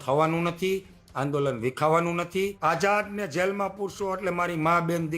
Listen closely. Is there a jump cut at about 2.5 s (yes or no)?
yes